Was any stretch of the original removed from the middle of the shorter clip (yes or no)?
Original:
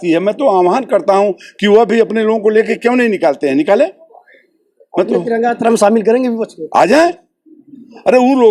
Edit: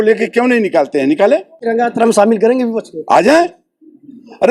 yes